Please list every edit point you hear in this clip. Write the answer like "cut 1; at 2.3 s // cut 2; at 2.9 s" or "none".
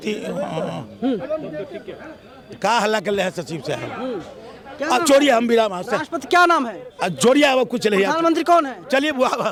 none